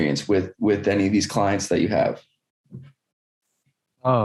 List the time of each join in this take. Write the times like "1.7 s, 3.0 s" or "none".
none